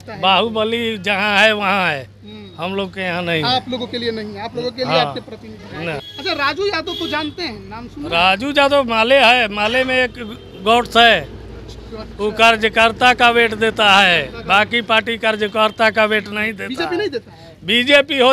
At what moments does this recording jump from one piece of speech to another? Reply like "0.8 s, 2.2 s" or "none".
6.0 s